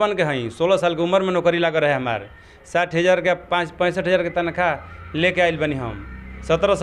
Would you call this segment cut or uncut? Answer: uncut